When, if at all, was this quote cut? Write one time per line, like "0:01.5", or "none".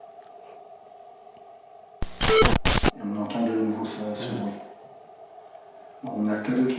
0:01.9
0:03.0